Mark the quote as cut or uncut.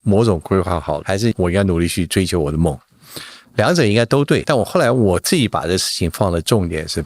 cut